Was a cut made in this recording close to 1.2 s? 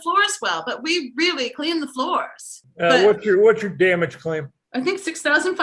no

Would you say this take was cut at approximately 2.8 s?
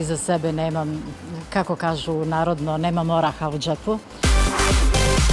no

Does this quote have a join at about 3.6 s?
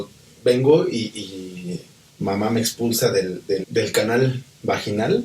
yes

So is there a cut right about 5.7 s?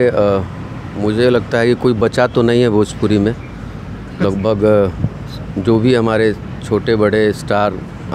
no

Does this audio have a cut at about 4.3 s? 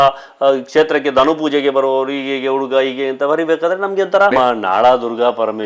yes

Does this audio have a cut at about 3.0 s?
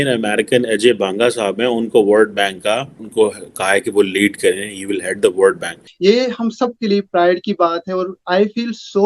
yes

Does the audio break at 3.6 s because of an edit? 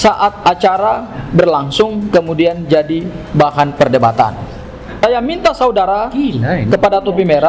no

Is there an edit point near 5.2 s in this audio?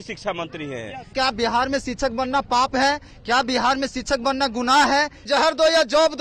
yes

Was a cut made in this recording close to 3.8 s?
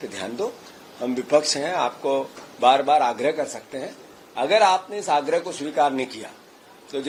no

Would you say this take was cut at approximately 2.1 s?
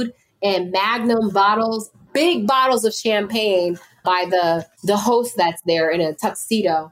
no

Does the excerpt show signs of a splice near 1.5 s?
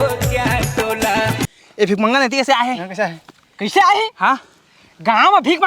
yes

